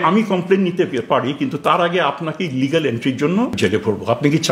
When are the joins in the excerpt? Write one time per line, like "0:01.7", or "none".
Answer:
0:03.6

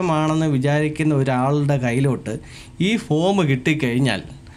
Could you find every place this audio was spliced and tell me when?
none

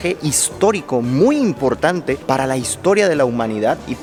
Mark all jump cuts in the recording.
none

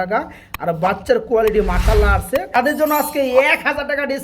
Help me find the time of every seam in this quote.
0:02.7

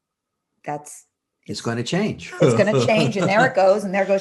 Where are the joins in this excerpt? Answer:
none

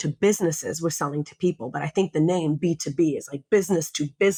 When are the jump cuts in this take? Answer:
none

